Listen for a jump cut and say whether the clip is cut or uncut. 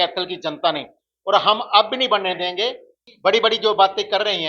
uncut